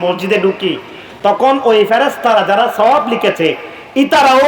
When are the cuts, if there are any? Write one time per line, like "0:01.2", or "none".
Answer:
none

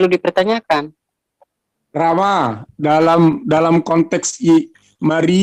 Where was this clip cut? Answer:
none

